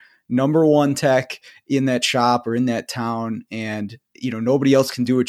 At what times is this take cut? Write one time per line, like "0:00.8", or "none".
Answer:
0:04.0